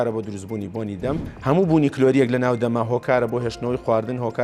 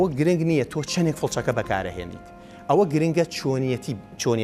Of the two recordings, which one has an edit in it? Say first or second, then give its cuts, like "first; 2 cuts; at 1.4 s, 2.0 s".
first; 1 cut; at 1.3 s